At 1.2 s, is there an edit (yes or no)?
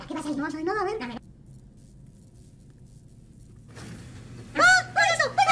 yes